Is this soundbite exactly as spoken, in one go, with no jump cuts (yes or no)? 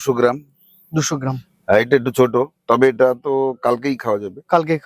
yes